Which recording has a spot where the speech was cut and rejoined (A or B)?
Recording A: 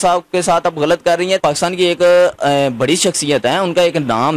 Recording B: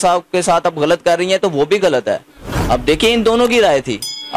A